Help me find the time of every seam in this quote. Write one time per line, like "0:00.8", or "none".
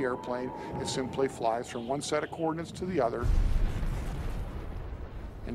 none